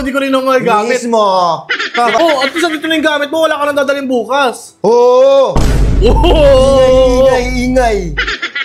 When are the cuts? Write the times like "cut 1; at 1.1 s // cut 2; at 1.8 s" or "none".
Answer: cut 1; at 2.2 s